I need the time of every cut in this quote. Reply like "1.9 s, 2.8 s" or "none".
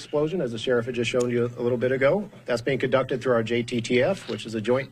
none